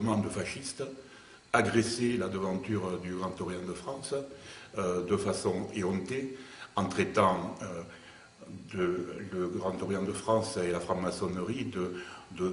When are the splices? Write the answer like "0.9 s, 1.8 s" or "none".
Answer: none